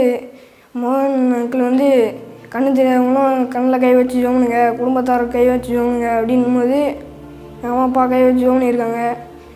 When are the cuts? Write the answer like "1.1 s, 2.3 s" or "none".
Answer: none